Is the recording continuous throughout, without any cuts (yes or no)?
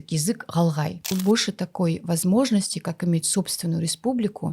no